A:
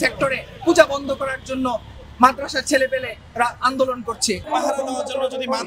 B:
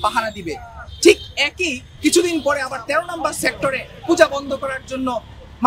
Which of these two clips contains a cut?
A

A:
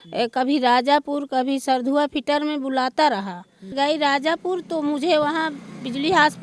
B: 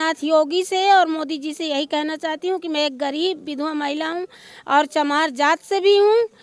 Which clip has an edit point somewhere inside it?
A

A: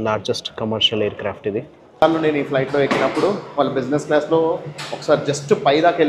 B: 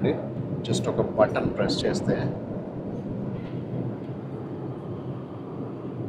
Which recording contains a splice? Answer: A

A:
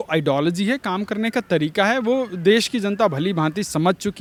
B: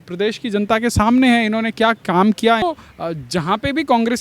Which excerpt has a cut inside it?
B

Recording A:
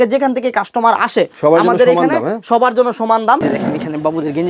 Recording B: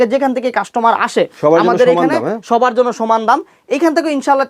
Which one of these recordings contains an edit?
A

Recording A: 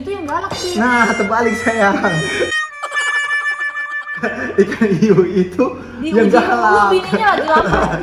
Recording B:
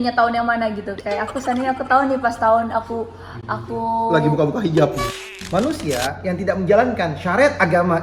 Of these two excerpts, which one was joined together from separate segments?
B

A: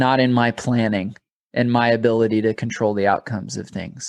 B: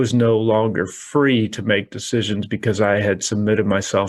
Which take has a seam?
A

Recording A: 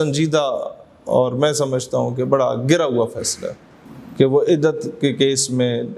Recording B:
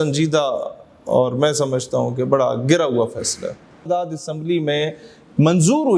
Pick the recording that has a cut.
B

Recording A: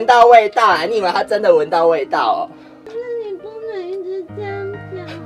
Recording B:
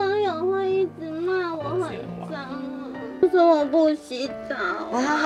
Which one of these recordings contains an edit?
B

